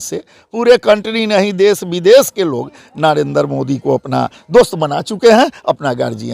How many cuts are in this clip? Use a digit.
0